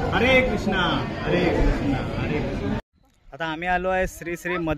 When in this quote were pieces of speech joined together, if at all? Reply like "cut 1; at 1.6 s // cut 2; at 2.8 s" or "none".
cut 1; at 3.1 s